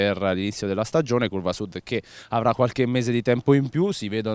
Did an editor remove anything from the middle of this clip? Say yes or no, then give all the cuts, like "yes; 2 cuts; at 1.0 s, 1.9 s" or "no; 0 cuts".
no; 0 cuts